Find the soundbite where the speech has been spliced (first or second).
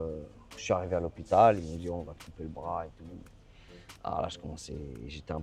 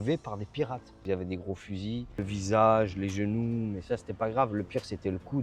second